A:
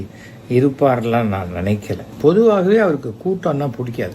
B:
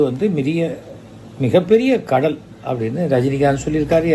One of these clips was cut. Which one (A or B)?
A